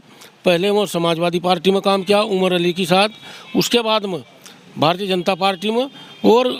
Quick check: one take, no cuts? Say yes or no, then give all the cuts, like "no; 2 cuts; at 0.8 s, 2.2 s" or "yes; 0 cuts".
yes; 0 cuts